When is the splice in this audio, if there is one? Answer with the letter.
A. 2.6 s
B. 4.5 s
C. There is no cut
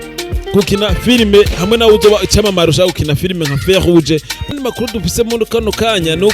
B